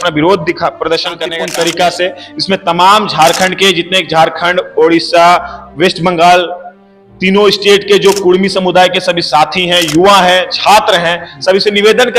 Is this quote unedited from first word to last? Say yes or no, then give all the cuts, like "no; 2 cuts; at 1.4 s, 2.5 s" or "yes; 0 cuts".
no; 1 cut; at 1.3 s